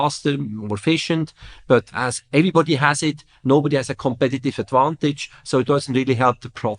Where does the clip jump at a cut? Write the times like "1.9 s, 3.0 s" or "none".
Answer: 1.9 s